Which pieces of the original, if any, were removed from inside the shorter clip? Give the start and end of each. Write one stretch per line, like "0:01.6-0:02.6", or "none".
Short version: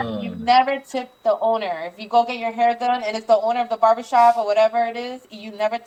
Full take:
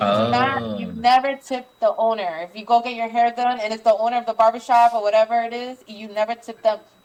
none